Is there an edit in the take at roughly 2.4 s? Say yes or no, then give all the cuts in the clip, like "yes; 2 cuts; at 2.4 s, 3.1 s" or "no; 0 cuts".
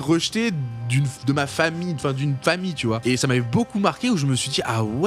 no; 0 cuts